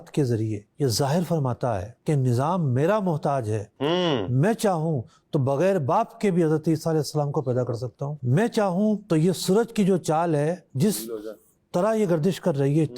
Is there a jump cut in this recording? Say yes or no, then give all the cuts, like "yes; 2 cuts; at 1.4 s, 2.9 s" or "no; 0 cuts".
yes; 1 cut; at 8.1 s